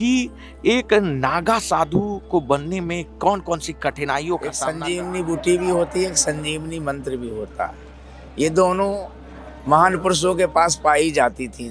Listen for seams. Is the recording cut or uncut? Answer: cut